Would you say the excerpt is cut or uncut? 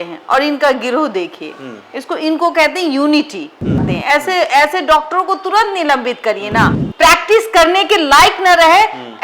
cut